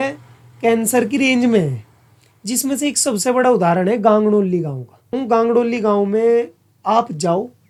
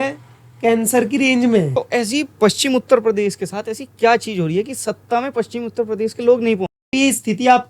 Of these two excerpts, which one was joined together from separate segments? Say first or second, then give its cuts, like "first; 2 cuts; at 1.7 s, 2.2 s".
second; 2 cuts; at 1.7 s, 6.8 s